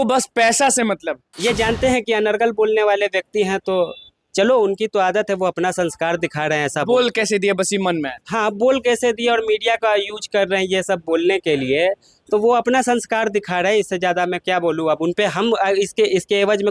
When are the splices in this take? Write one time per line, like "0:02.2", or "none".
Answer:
0:01.2